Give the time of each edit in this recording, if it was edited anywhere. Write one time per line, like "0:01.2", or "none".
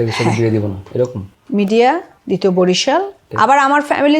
0:02.1
0:03.2